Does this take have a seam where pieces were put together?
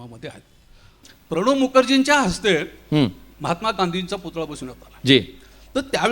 yes; 1 cut; at 1.1 s

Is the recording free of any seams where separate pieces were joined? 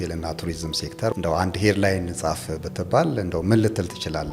no; 1 cut; at 1.1 s

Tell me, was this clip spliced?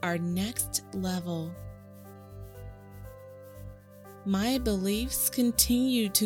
yes; 2 cuts; at 2.3 s, 4.2 s

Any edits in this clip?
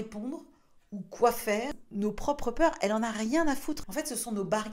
yes; 2 cuts; at 1.8 s, 3.8 s

